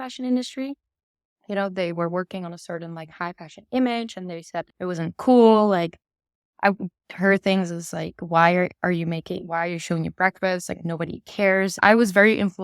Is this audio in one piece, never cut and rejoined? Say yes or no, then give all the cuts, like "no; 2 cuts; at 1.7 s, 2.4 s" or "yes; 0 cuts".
no; 2 cuts; at 4.7 s, 11.8 s